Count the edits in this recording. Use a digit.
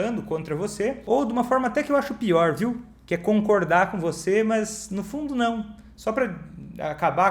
1